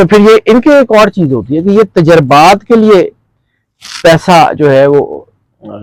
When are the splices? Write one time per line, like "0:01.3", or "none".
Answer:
none